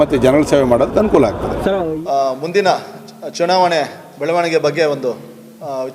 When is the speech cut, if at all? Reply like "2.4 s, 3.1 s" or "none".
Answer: 1.7 s